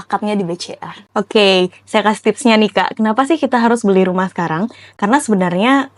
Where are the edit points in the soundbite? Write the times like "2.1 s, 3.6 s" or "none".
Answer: 1.1 s